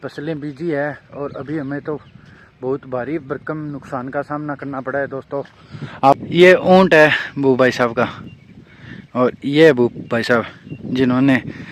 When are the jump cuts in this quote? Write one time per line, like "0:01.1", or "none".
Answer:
0:06.2